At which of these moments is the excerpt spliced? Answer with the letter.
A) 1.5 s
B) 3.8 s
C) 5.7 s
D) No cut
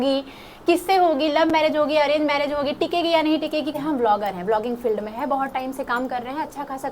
B